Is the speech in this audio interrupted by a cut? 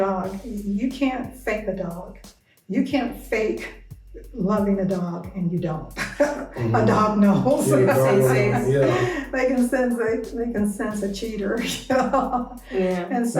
no; 0 cuts

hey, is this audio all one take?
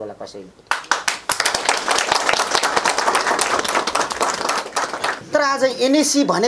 no; 1 cut; at 5.2 s

